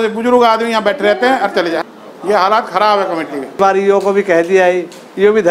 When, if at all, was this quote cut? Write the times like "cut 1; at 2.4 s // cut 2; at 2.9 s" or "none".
cut 1; at 3.6 s